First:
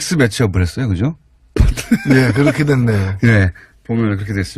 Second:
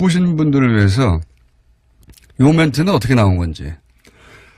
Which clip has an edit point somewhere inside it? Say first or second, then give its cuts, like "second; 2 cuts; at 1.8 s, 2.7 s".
first; 1 cut; at 3.6 s